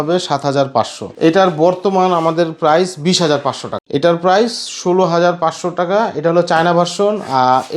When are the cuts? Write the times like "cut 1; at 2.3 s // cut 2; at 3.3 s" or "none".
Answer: cut 1; at 1.0 s // cut 2; at 3.7 s